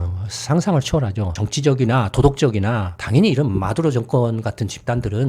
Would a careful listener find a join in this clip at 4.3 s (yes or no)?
no